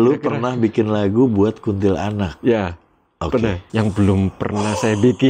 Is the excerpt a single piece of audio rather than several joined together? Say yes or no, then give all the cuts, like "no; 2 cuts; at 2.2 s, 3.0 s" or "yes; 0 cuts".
no; 1 cut; at 3.6 s